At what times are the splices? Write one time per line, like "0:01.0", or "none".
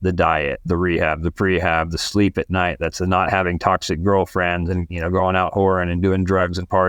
none